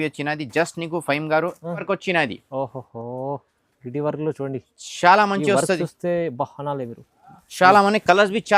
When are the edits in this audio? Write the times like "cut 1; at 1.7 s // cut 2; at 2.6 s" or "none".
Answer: cut 1; at 1.8 s